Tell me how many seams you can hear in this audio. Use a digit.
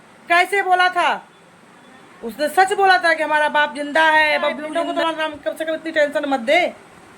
1